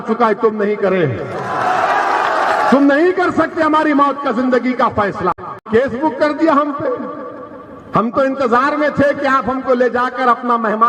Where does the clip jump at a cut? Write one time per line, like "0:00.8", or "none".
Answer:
0:05.7